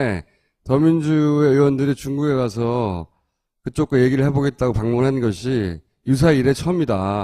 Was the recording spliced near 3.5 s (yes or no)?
yes